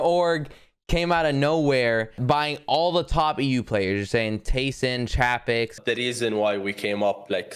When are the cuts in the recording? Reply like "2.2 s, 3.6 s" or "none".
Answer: 2.2 s, 5.8 s